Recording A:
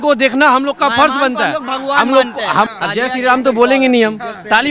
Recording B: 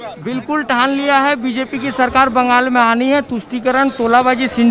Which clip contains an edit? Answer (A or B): A